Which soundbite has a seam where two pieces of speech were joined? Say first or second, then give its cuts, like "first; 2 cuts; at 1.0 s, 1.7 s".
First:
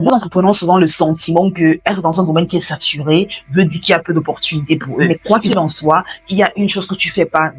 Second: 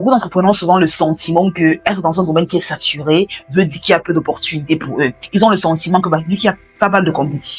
first; 1 cut; at 5.0 s